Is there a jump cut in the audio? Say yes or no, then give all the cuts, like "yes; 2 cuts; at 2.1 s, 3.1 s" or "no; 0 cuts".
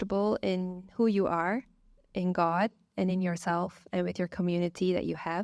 no; 0 cuts